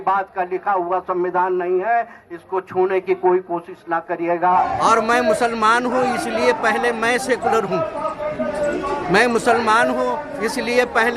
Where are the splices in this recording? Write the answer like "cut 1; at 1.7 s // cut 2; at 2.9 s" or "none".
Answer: cut 1; at 4.4 s